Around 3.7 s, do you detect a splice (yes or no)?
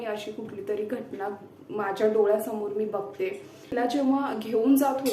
yes